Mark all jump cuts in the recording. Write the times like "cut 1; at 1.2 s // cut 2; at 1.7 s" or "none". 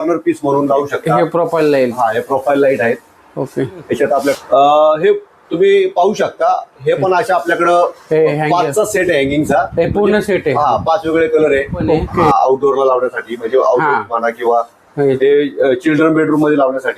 cut 1; at 4.4 s // cut 2; at 12.1 s